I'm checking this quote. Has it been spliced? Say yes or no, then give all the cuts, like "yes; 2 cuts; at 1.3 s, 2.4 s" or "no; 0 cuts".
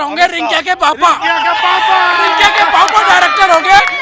no; 0 cuts